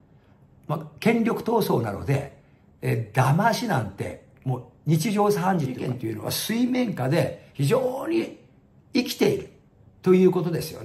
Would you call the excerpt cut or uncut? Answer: cut